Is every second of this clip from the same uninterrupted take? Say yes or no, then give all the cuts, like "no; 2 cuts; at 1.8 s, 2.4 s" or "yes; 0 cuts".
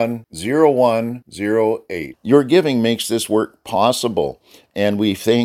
yes; 0 cuts